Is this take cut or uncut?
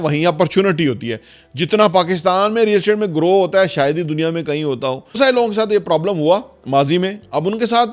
cut